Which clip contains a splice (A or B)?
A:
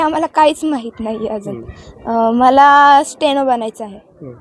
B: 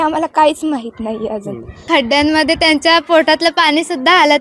B